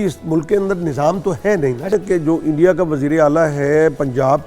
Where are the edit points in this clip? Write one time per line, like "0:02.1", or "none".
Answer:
0:01.9